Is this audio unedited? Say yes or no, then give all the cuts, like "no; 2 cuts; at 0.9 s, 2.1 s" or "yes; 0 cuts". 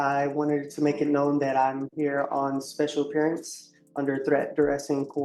yes; 0 cuts